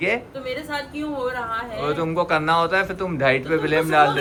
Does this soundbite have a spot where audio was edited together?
no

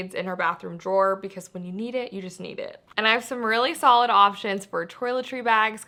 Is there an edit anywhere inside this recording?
no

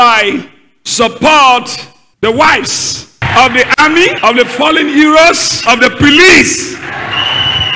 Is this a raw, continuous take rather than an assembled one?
no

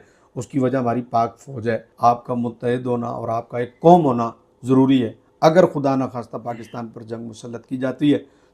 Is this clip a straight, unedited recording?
no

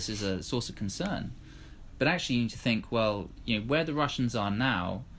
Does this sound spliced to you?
no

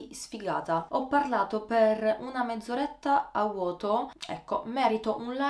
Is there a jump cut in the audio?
yes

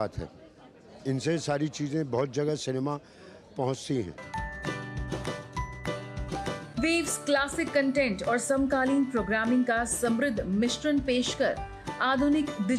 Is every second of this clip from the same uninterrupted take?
no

